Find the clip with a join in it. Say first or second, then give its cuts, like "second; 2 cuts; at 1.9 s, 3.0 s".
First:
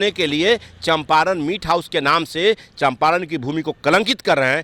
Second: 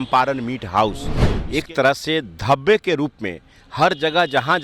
second; 1 cut; at 1.3 s